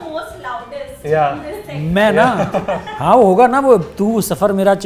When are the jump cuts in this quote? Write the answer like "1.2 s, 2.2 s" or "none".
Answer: none